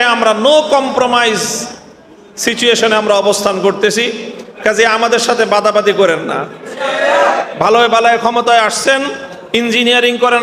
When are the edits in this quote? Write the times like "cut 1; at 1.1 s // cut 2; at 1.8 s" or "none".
none